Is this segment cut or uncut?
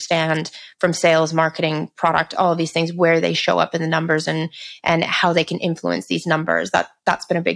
uncut